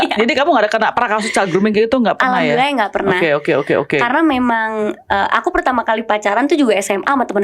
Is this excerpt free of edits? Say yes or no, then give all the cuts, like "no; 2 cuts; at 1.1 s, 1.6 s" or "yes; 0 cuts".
yes; 0 cuts